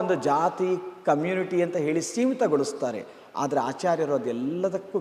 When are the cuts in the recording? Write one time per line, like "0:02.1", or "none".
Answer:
none